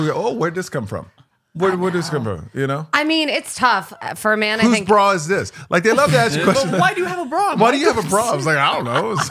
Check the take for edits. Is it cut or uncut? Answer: uncut